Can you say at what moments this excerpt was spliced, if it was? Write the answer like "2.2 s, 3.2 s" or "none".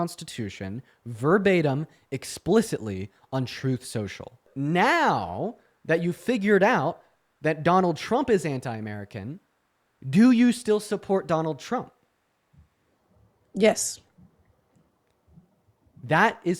4.5 s